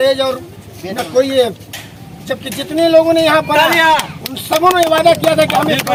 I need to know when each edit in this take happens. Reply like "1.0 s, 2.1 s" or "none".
none